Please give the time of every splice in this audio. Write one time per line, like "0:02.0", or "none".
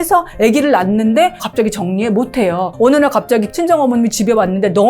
0:01.4
0:02.7
0:03.5